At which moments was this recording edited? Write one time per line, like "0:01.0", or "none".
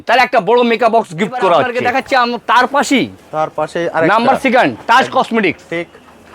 0:01.7